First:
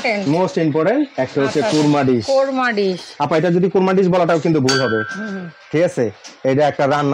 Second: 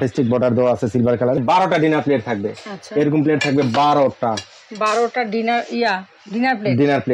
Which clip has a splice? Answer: second; 1 cut; at 1.4 s

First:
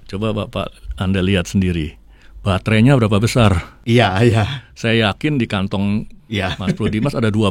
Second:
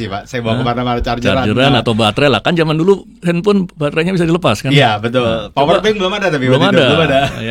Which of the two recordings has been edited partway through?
first; 2 cuts; at 3.7 s, 6.2 s

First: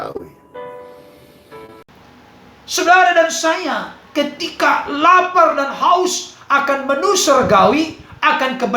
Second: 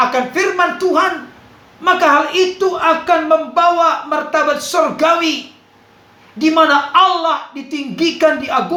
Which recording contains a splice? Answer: first; 1 cut; at 1.9 s

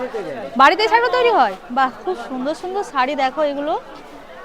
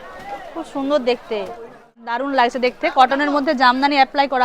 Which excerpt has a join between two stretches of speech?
second; 1 cut; at 2.1 s

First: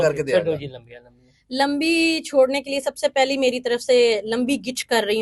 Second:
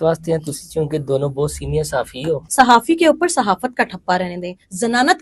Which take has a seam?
second; 1 cut; at 2.4 s

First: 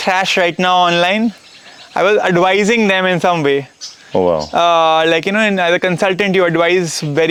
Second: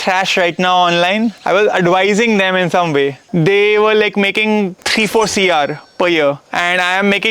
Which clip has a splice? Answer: second; 4 cuts; at 1.4 s, 3.2 s, 4.8 s, 6.5 s

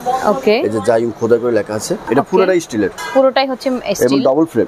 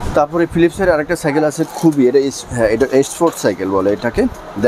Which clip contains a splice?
first; 1 cut; at 2.0 s

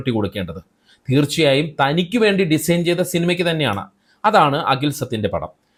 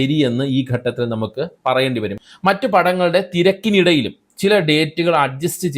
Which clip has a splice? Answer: second; 1 cut; at 2.2 s

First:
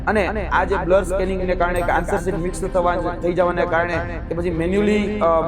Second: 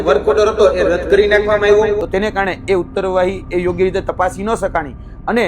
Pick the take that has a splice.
second; 1 cut; at 2.0 s

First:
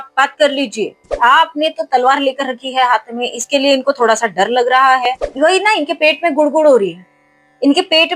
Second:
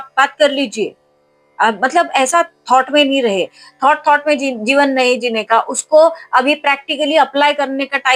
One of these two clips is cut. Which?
first; 2 cuts; at 1.1 s, 5.2 s

